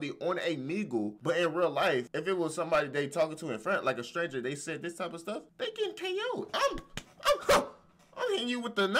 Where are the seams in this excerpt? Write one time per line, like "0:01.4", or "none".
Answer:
0:01.2
0:02.1
0:05.5